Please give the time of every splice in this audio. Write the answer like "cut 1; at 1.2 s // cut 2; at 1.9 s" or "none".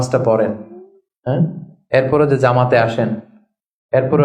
none